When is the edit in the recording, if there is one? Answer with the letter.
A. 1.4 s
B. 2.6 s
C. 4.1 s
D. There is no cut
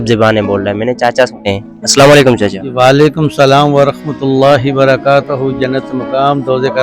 A